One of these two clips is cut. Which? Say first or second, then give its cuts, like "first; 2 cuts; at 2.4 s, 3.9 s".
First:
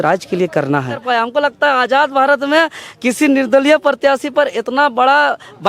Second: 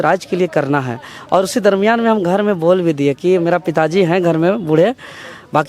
first; 1 cut; at 1.0 s